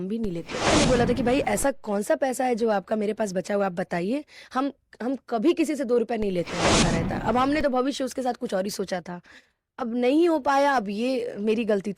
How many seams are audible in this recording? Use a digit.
2